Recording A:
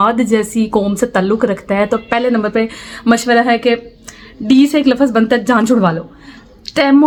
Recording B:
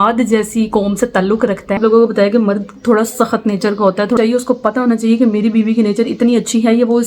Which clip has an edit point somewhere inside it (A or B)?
B